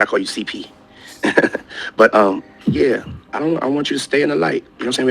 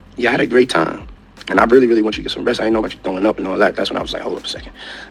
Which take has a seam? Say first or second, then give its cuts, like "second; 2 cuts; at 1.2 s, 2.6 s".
first; 1 cut; at 1.3 s